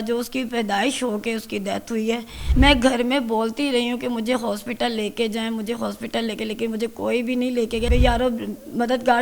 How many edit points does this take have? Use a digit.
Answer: 2